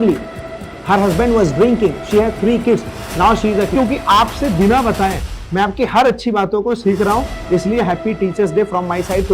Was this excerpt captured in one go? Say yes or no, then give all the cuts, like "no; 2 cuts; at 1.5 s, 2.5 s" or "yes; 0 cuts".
no; 1 cut; at 3.7 s